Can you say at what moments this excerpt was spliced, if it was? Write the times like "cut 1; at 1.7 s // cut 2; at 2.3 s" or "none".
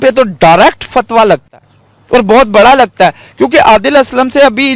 none